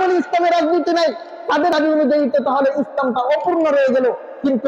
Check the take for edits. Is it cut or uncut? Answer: cut